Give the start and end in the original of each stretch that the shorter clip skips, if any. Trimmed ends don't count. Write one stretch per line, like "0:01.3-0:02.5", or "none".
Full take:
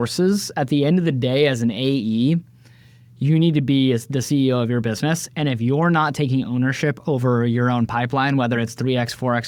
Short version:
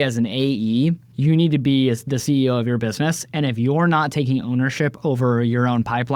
0:02.5-0:03.1